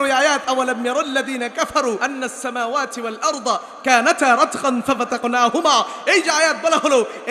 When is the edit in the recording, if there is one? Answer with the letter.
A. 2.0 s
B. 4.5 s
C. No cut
A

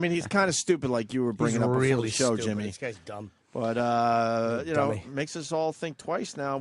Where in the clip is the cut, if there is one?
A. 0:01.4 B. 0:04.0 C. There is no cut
B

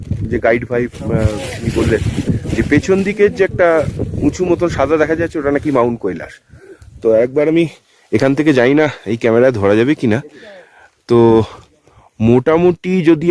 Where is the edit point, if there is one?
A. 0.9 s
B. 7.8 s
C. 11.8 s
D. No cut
D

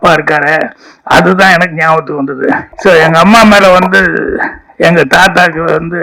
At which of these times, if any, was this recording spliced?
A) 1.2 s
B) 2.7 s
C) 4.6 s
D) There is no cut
B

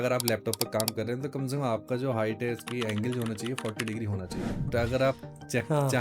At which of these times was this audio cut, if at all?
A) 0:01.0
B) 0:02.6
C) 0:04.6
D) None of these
C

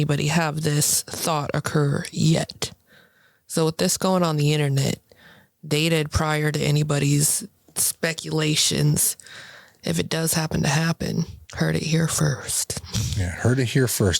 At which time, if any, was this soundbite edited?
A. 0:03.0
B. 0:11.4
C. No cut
B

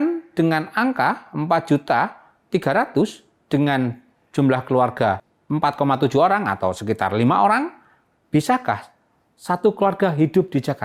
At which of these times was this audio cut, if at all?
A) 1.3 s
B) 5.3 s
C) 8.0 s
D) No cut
B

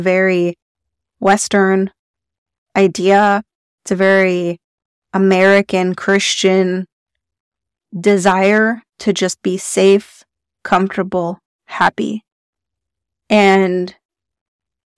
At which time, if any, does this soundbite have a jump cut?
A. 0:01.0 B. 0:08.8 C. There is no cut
A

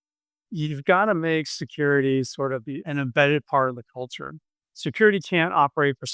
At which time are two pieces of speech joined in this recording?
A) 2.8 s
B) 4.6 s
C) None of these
A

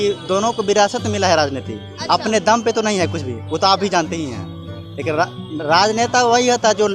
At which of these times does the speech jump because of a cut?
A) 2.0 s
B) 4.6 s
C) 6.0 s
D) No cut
D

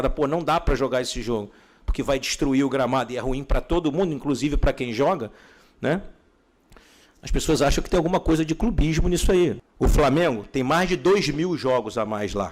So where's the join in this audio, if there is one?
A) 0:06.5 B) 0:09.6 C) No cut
B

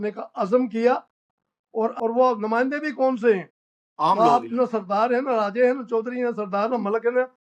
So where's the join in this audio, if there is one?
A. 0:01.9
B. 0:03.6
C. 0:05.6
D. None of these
A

